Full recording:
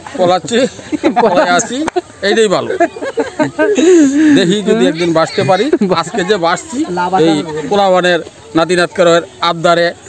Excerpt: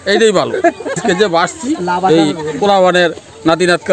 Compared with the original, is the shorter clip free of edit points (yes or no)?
no